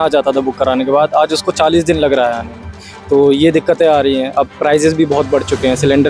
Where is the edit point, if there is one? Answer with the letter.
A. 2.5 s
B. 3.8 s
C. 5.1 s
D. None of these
D